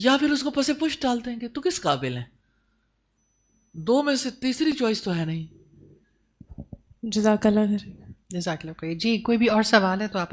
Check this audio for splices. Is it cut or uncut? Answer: uncut